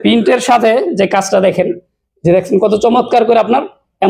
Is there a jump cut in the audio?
no; 0 cuts

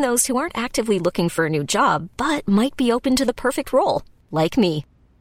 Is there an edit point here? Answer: no; 0 cuts

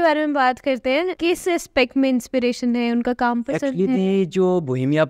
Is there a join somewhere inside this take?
yes; 1 cut; at 1.1 s

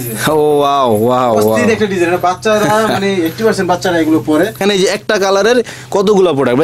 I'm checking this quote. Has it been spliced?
yes; 1 cut; at 4.6 s

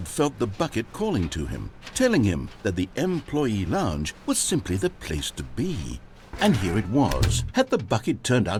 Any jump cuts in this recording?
no; 0 cuts

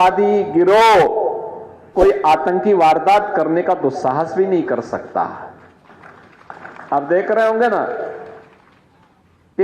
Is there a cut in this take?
no; 0 cuts

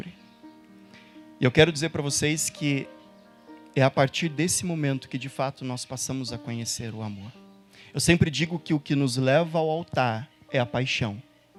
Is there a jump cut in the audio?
no; 0 cuts

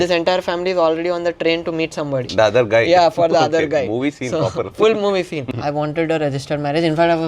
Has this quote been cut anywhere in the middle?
yes; 2 cuts; at 2.3 s, 5.4 s

